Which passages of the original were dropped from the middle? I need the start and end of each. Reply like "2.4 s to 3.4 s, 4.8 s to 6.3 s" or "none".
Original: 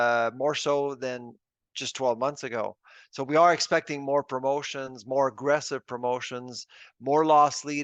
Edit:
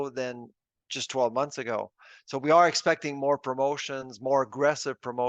none